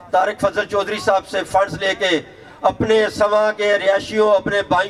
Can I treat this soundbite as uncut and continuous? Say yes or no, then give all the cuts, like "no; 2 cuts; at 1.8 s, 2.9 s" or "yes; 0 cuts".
yes; 0 cuts